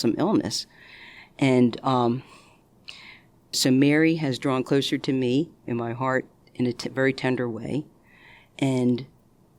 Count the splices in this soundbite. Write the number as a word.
two